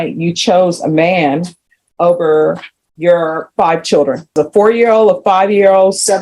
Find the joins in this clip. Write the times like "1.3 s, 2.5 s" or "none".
4.4 s